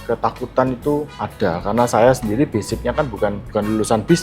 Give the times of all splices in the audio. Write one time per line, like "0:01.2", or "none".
0:01.2
0:03.4